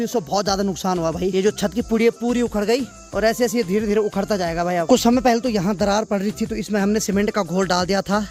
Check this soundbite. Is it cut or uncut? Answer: uncut